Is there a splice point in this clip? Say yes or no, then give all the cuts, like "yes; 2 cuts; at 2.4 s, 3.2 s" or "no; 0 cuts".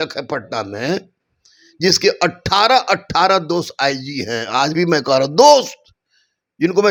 no; 0 cuts